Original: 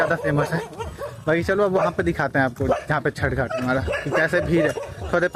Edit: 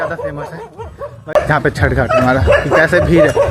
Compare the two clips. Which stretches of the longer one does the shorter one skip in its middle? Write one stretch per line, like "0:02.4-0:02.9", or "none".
0:01.3-0:02.8